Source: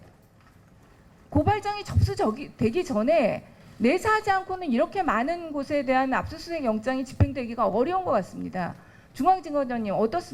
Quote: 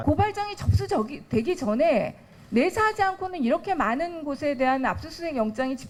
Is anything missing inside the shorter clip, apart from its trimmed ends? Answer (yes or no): no